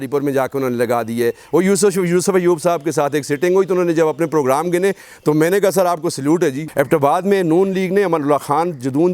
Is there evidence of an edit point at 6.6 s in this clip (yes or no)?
yes